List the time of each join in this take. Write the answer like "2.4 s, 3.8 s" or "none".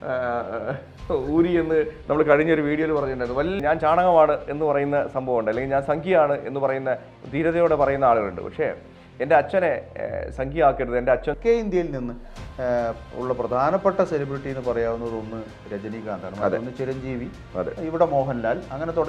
3.6 s, 11.4 s